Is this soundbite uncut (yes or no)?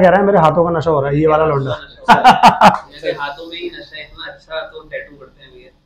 yes